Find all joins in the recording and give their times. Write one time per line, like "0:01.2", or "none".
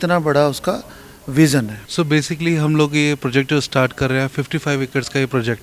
0:01.9